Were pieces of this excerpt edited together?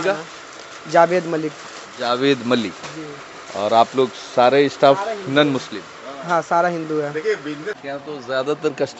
yes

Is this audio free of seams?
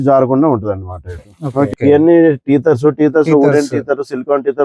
no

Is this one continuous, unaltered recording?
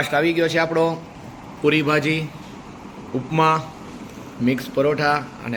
yes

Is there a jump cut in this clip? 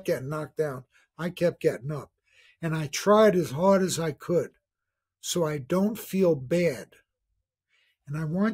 no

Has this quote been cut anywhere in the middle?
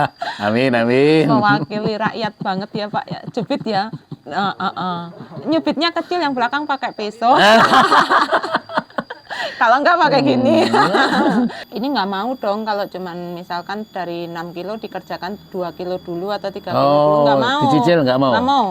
yes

